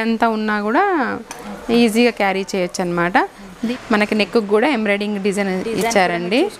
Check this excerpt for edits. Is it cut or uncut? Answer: cut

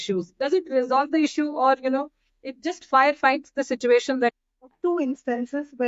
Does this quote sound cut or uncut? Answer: cut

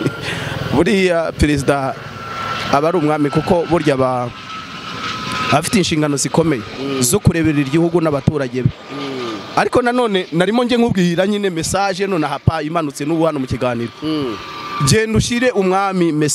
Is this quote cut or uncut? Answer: uncut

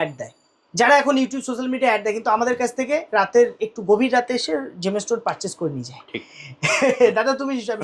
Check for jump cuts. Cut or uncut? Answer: uncut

